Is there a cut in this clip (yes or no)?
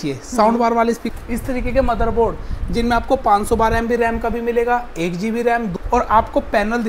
yes